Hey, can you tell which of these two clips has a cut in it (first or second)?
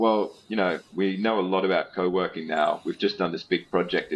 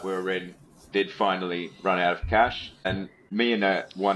second